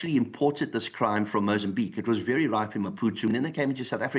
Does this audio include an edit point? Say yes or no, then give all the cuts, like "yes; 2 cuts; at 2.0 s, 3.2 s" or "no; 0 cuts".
yes; 1 cut; at 3.3 s